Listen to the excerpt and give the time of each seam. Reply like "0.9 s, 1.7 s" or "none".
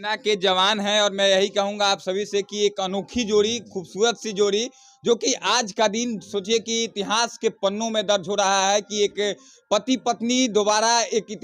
none